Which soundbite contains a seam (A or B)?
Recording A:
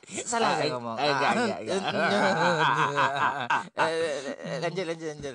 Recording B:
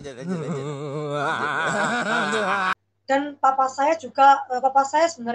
B